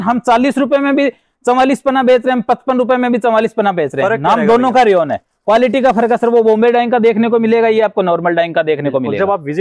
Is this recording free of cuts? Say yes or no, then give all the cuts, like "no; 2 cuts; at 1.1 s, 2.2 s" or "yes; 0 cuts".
yes; 0 cuts